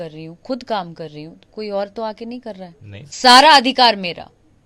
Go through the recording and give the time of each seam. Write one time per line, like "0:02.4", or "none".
0:03.1